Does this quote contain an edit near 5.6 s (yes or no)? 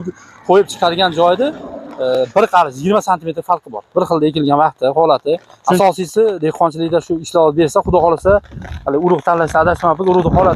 yes